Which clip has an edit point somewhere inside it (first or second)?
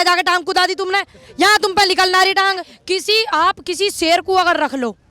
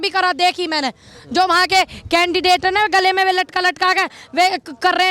first